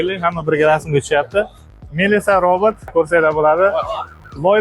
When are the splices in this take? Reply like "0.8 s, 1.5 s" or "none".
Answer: 1.8 s